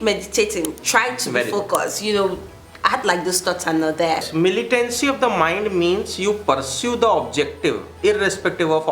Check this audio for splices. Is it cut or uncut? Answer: cut